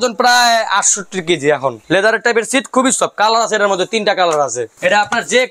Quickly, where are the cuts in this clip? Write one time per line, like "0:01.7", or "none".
0:01.8
0:04.7